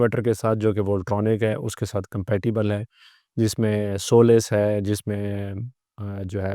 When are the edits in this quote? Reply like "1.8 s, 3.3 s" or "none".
none